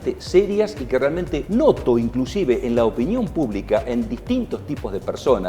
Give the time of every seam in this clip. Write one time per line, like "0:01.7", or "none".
0:01.4